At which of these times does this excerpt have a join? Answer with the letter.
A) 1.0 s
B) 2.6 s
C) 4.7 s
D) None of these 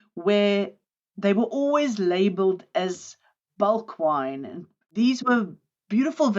C